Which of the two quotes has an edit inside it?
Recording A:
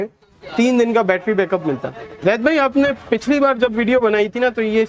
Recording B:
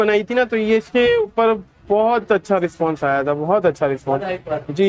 A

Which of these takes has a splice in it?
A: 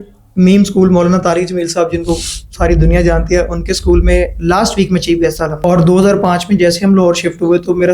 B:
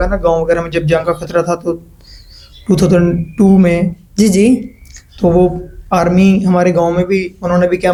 A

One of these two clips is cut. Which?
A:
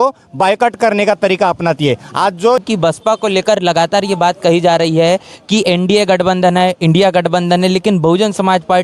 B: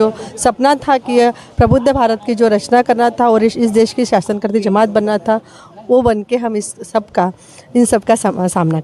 A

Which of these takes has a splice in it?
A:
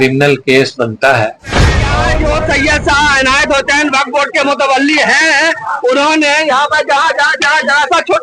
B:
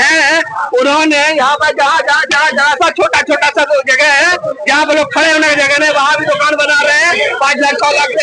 A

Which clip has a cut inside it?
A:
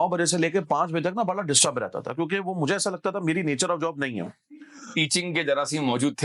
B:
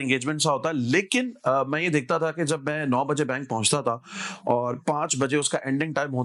A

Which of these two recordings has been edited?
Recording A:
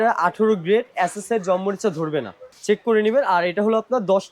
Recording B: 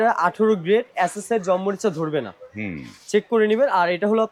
A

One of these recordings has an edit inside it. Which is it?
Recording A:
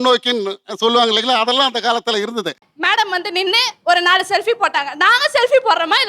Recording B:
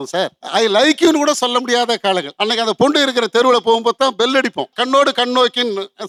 A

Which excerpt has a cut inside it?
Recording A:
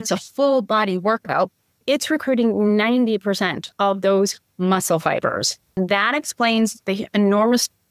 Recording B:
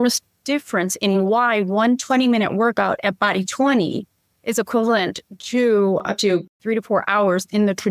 A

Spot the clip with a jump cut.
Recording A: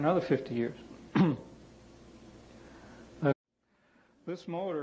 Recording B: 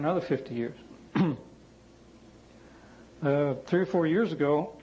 B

